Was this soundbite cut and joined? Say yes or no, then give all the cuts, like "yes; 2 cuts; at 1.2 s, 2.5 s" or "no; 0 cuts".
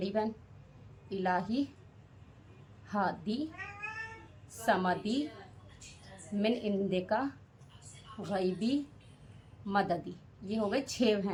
no; 0 cuts